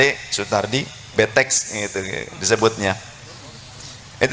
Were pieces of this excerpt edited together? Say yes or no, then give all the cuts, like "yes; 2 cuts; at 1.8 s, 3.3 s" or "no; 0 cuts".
no; 0 cuts